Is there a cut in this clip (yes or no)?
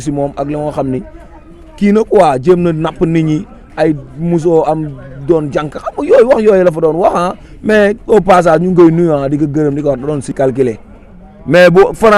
yes